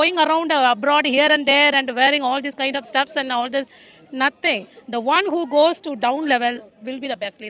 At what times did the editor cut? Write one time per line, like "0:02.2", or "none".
none